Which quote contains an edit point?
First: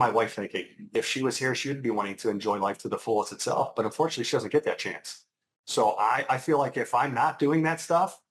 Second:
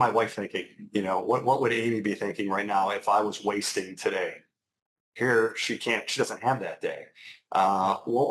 first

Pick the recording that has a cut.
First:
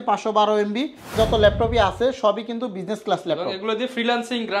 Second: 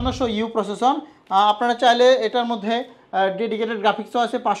first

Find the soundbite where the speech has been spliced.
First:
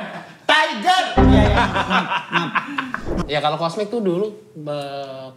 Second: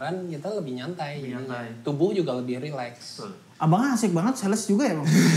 first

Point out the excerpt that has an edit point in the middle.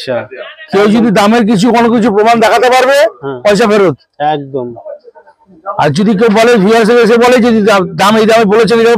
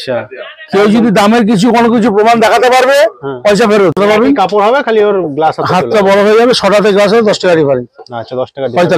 second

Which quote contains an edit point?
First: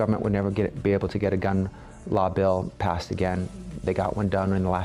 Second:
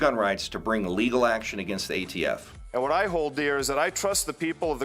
second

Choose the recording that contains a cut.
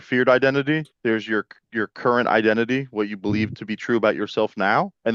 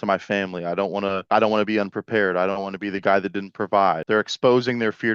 second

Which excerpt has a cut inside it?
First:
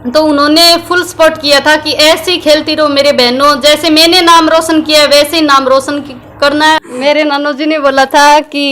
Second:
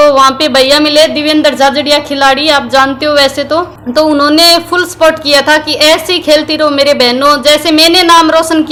first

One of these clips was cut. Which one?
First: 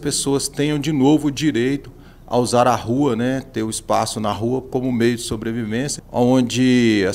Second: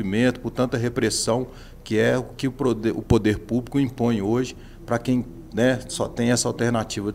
first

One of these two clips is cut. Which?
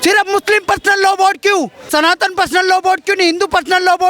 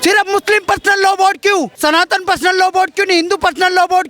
second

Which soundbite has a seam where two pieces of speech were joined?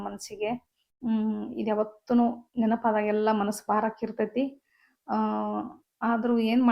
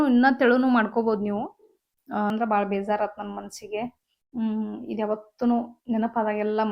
second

